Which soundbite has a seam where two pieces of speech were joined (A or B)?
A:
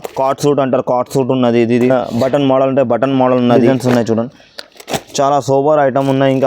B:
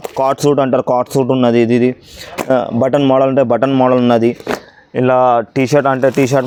A